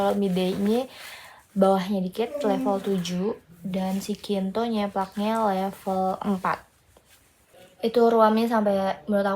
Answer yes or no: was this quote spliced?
yes